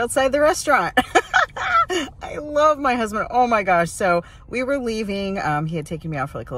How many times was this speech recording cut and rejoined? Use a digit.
1